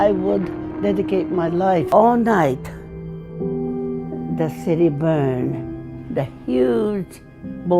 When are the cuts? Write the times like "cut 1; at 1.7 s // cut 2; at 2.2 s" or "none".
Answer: cut 1; at 1.9 s